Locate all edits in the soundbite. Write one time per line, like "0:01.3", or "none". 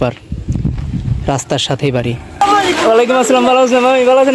0:02.5